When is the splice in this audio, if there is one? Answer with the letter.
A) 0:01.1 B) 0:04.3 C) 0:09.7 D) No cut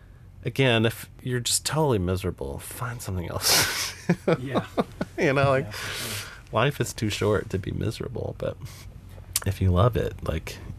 A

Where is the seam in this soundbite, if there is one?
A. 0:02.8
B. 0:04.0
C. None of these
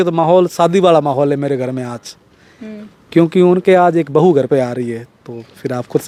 C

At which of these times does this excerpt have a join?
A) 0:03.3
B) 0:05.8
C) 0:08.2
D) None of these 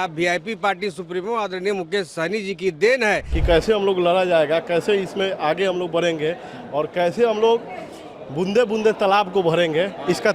A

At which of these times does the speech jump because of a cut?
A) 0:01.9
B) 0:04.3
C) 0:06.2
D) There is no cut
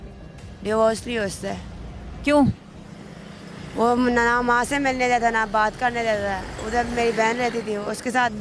D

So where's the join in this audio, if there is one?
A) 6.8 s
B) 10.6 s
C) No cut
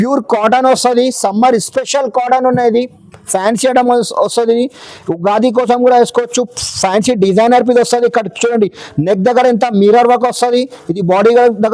C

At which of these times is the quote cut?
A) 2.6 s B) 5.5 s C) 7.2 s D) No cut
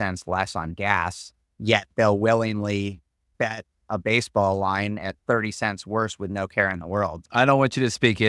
C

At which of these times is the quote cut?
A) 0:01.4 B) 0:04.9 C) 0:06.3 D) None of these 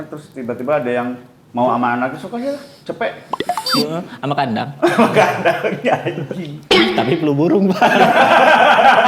D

